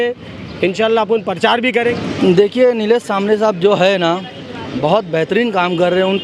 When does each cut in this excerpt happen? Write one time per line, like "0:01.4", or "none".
0:01.9